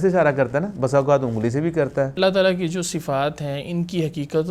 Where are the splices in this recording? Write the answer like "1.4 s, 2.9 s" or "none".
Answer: 2.1 s